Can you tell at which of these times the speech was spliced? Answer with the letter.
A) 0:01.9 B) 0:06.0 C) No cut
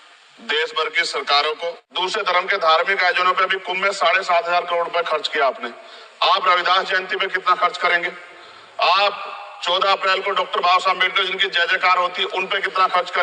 A